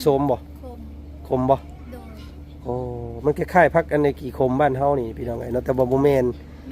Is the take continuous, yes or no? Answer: yes